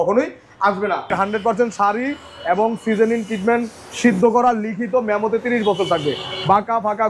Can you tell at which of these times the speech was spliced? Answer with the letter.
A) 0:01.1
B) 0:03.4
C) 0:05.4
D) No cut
A